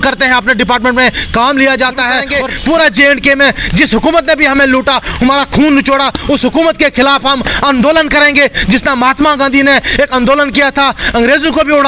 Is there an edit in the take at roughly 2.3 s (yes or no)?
yes